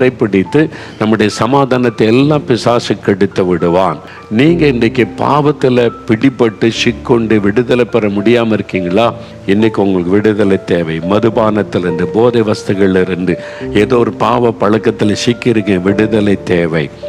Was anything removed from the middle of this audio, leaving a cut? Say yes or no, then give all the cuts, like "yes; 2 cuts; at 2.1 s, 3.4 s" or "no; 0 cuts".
yes; 1 cut; at 4.1 s